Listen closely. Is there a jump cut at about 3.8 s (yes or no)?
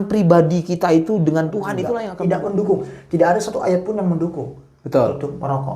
no